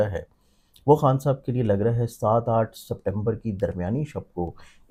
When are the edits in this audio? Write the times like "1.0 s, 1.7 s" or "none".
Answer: none